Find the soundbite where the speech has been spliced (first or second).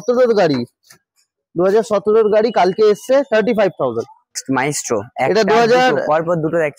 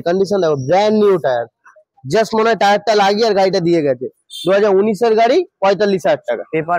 first